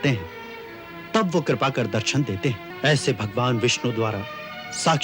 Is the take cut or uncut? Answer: cut